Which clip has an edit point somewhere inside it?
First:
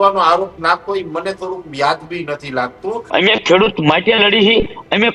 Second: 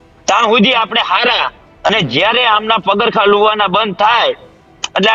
first; 1 cut; at 3.1 s

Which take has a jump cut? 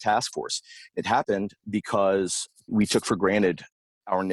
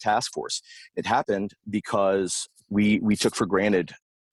first; 1 cut; at 2.7 s

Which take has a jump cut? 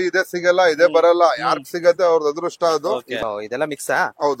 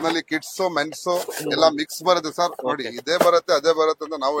first; 1 cut; at 3.1 s

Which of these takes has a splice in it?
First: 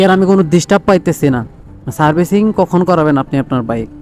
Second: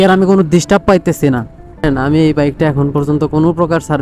second; 1 cut; at 1.8 s

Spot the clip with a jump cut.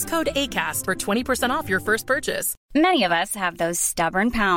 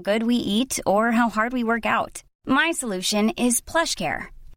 first; 1 cut; at 2.5 s

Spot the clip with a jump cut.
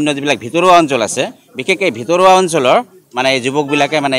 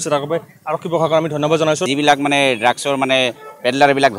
second; 1 cut; at 1.8 s

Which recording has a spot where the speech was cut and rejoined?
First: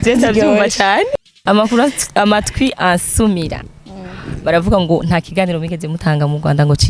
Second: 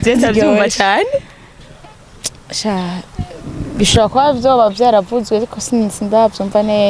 first; 1 cut; at 1.3 s

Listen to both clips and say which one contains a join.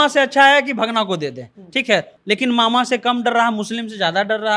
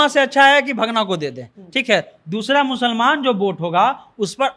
first; 1 cut; at 2.1 s

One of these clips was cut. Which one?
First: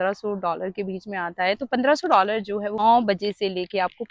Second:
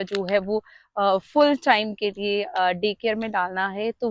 first; 1 cut; at 2.8 s

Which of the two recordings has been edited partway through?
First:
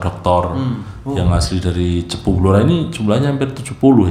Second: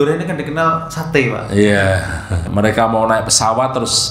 second; 1 cut; at 2.4 s

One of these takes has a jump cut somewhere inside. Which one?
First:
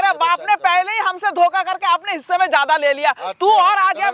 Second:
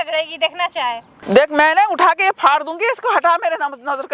second; 1 cut; at 1.1 s

